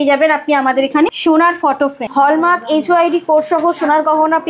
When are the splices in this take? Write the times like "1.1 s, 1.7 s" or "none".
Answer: 1.2 s, 2.0 s